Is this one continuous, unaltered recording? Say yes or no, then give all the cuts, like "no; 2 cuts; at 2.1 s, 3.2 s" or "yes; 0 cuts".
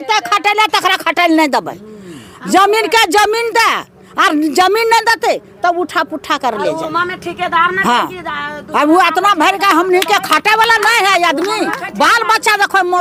yes; 0 cuts